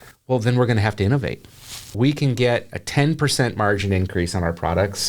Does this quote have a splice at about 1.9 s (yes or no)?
yes